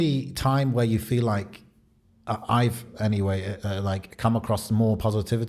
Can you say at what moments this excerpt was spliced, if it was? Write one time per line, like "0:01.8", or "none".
none